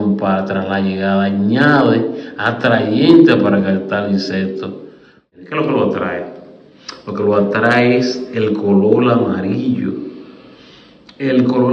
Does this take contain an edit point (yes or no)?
yes